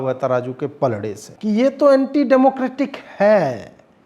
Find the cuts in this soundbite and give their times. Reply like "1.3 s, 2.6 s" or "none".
1.3 s